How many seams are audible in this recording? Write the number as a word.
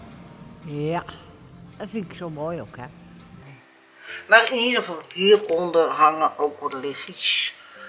one